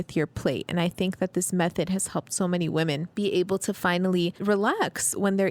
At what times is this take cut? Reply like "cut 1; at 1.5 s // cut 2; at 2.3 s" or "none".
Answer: cut 1; at 3.1 s // cut 2; at 4.4 s